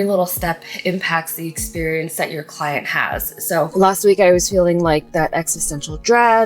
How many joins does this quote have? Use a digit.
1